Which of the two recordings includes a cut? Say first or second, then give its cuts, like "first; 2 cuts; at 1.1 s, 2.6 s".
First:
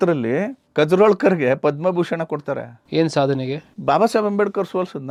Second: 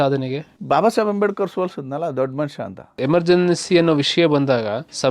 second; 1 cut; at 2.9 s